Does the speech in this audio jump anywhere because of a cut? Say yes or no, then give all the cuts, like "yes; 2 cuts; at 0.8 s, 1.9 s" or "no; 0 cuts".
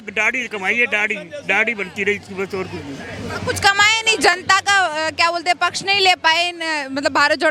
no; 0 cuts